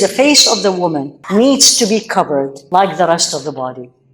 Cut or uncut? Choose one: cut